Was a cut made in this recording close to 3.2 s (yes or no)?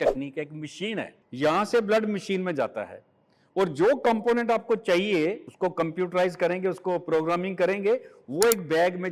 no